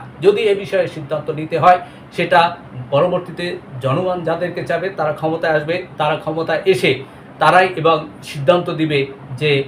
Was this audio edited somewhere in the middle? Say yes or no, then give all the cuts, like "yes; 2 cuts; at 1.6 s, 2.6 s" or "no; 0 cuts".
no; 0 cuts